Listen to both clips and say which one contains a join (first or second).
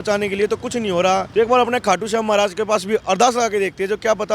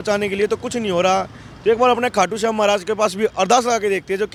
first